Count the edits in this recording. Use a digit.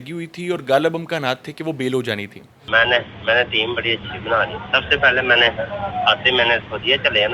0